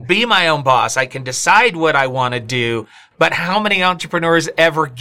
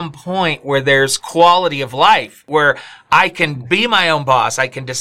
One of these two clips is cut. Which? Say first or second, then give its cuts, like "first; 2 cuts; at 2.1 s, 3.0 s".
second; 1 cut; at 2.4 s